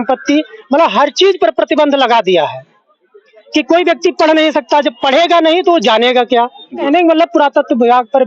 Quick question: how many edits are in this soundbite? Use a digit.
1